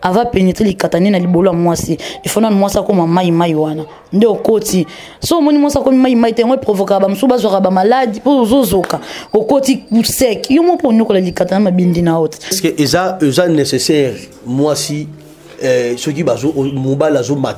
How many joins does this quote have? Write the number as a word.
one